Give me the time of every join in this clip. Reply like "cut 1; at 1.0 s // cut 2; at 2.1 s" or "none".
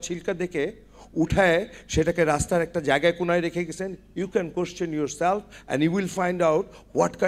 none